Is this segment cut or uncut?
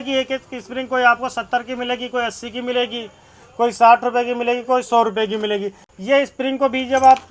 uncut